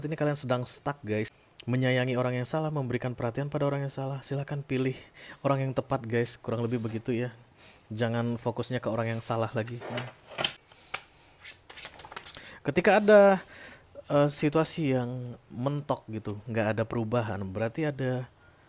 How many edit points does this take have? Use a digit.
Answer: 2